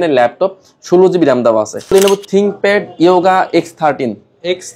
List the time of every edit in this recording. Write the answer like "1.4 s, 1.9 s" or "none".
1.9 s